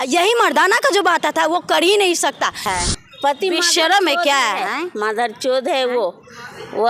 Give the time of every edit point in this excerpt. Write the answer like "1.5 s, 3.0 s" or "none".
2.7 s